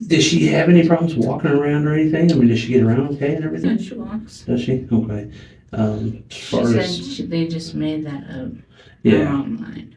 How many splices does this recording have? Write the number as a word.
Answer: one